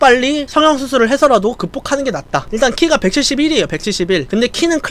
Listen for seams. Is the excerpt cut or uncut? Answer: cut